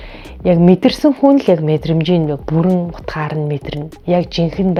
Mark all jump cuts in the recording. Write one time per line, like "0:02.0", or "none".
none